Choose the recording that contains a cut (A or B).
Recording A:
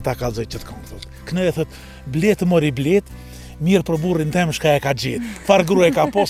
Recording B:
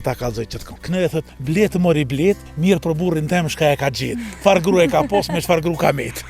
B